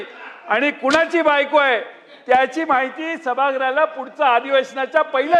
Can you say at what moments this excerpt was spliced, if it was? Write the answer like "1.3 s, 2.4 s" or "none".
none